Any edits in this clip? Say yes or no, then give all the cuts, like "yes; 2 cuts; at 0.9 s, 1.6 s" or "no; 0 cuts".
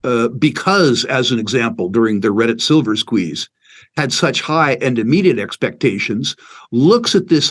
no; 0 cuts